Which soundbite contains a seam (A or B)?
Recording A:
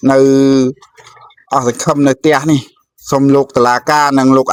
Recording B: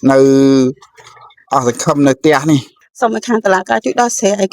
B